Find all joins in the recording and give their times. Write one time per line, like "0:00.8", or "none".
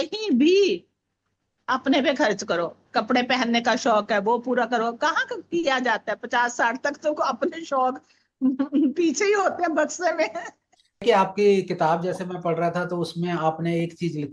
0:11.0